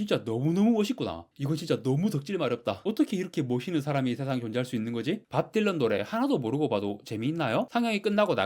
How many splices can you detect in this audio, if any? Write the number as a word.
three